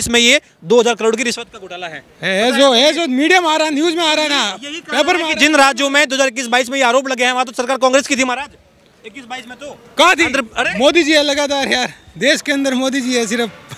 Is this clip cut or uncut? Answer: uncut